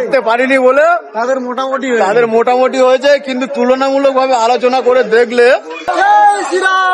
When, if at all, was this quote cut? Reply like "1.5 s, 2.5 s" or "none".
5.8 s